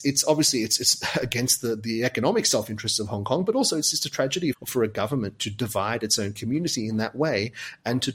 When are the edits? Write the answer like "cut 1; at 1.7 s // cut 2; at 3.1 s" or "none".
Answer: cut 1; at 4.6 s